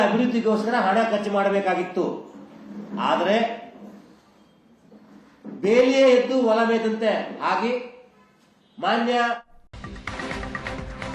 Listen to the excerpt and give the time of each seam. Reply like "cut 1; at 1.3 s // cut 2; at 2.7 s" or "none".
cut 1; at 9.9 s